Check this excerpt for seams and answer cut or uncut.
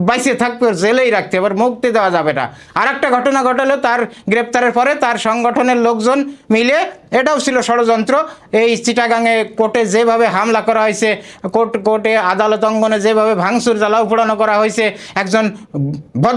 uncut